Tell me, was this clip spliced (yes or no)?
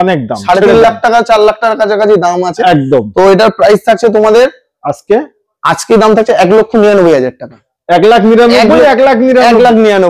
no